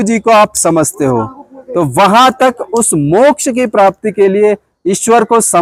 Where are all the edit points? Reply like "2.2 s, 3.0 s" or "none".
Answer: none